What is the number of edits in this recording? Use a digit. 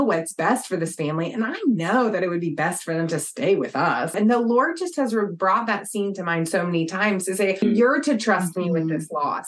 2